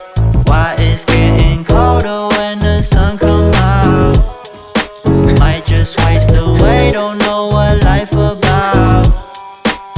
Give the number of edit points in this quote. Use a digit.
0